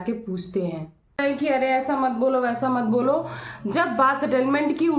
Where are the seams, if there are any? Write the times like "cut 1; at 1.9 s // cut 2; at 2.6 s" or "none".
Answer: cut 1; at 1.2 s